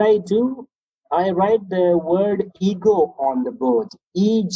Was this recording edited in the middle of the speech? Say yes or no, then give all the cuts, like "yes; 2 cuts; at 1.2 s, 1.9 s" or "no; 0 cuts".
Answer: no; 0 cuts